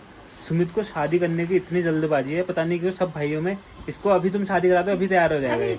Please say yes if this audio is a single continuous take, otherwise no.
yes